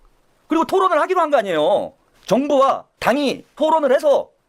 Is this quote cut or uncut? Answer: cut